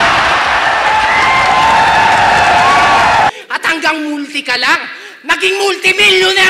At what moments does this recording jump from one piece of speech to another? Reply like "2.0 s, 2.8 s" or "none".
3.3 s